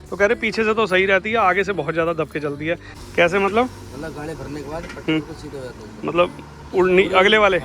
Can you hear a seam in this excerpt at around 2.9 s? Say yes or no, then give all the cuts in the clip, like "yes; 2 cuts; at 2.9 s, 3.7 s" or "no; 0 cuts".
yes; 1 cut; at 2.9 s